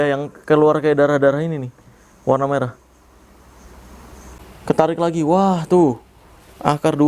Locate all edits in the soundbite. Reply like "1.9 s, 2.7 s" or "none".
4.4 s